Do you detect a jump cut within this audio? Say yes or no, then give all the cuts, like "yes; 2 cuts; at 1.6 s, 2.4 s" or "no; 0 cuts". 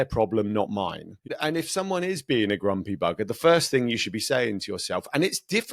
yes; 1 cut; at 1.3 s